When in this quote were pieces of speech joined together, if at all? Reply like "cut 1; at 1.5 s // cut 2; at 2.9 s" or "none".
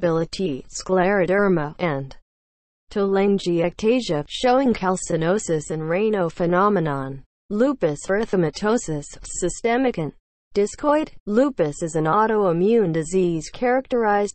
cut 1; at 3.4 s